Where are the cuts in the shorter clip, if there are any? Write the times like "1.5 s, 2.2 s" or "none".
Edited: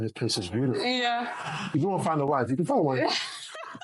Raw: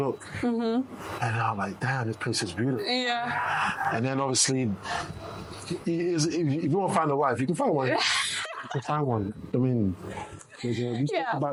1.7 s